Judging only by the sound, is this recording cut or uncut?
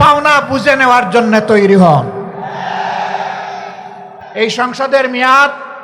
cut